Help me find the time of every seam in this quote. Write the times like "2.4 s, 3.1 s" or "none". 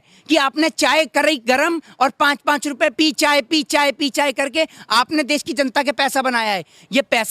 none